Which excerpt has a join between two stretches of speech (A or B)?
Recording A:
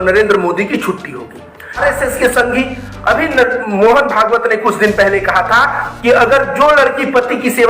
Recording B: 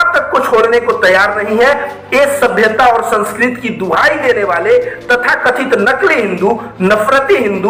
A